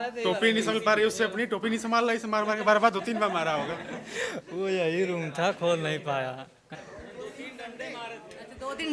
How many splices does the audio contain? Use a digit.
1